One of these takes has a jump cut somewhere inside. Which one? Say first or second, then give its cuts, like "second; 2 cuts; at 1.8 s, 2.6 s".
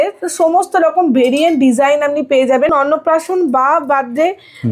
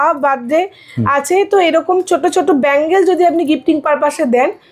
first; 1 cut; at 2.7 s